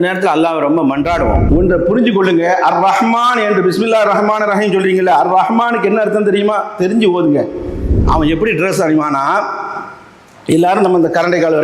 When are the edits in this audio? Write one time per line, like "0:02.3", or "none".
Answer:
0:01.4
0:07.9

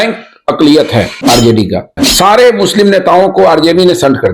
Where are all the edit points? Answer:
0:01.9

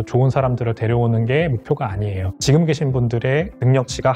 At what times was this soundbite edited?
0:02.2

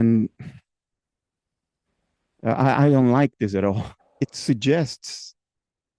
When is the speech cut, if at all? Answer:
0:03.9

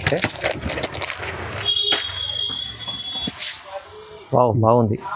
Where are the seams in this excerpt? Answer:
0:03.4

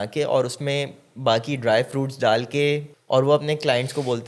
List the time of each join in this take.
0:02.9

